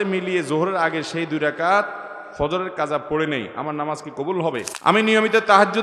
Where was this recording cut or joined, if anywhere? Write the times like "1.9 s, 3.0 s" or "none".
4.7 s